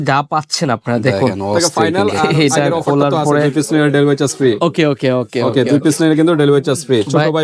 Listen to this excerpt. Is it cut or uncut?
cut